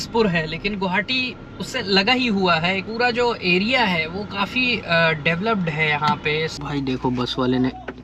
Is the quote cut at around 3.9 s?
no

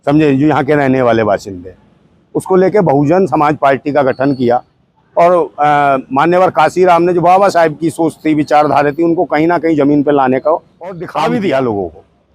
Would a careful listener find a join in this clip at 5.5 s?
no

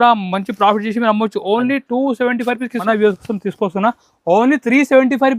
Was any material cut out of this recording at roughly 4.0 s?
no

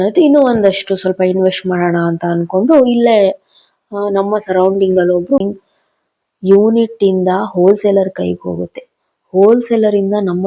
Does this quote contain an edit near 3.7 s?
no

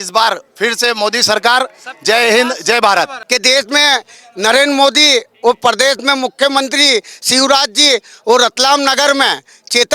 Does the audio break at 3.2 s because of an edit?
yes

